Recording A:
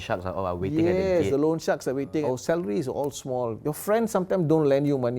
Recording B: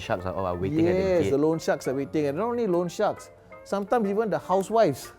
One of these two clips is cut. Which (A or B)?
A